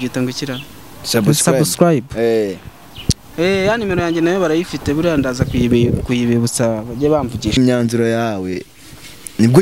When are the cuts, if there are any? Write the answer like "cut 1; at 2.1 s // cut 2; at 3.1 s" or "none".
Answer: cut 1; at 7.5 s